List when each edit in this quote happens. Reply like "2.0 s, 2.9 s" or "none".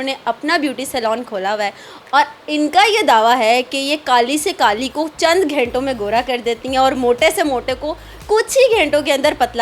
none